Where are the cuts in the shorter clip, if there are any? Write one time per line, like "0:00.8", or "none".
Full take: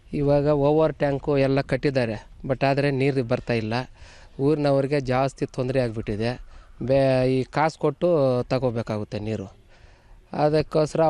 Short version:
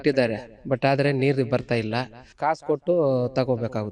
0:02.3